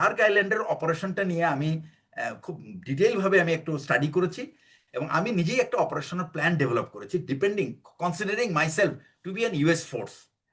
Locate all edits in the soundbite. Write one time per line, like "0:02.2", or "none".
none